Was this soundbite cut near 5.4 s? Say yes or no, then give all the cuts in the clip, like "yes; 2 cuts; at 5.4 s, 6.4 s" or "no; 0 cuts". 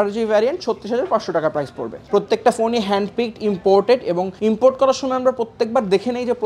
no; 1 cut; at 2.1 s